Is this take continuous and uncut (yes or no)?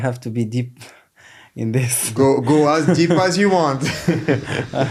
yes